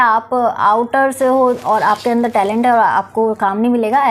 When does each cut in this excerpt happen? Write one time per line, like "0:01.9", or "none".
none

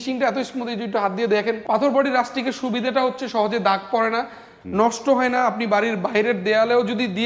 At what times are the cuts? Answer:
0:01.6

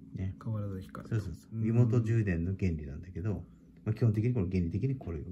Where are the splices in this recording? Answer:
0:01.4

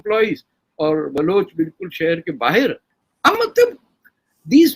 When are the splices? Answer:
0:02.9

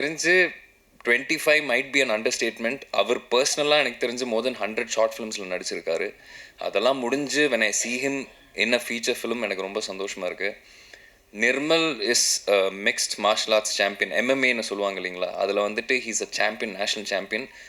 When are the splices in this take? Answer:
none

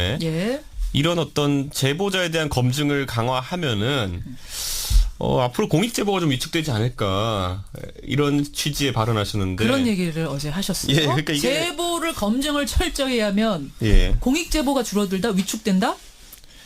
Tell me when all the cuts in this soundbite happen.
0:15.1

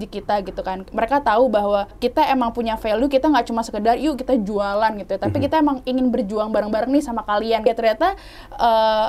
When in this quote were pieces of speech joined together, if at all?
0:01.9
0:07.7

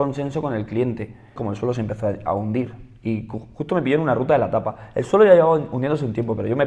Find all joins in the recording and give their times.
0:01.4

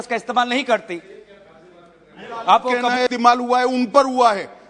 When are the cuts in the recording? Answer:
0:03.1

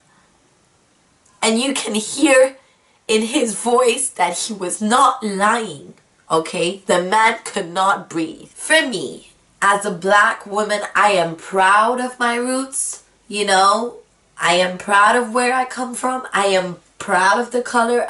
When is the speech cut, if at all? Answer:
0:08.5

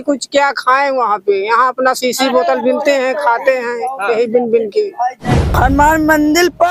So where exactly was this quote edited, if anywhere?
0:05.5

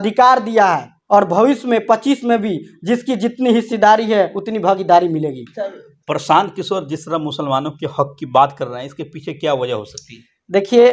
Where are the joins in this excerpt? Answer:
none

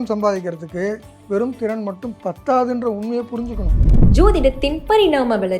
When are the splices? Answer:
0:03.8

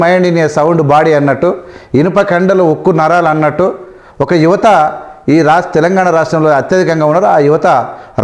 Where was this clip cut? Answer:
none

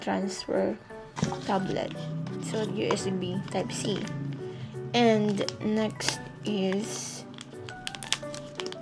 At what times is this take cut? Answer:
0:01.1

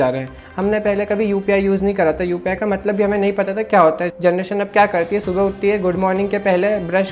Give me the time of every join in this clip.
0:04.1

